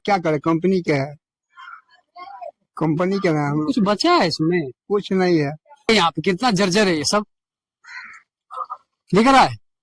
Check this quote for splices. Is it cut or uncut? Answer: cut